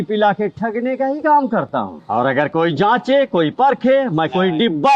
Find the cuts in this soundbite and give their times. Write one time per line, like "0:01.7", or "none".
0:02.0